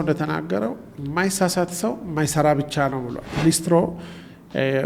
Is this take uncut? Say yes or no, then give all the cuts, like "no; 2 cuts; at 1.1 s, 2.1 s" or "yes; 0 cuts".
no; 1 cut; at 3.3 s